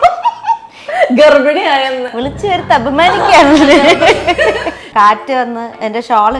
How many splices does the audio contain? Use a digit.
1